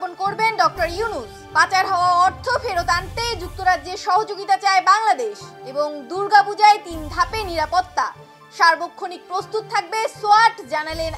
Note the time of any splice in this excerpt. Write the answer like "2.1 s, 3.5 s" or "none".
none